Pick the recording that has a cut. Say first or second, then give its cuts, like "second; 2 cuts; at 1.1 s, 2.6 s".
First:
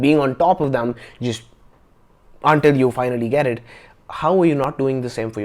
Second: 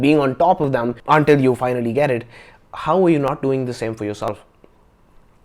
second; 1 cut; at 1.0 s